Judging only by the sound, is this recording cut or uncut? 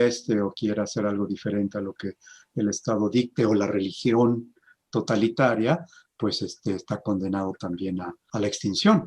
cut